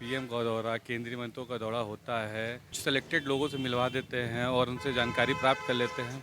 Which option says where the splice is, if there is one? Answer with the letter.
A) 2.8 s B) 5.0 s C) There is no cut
A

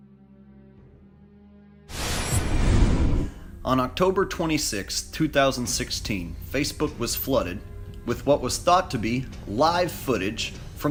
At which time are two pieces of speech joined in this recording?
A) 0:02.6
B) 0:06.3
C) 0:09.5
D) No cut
D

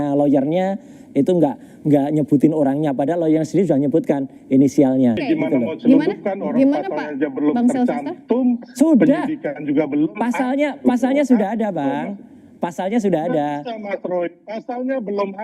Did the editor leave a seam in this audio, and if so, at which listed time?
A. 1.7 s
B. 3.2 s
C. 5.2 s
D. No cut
C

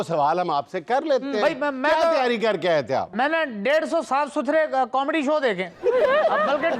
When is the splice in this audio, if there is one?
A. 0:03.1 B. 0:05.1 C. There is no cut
A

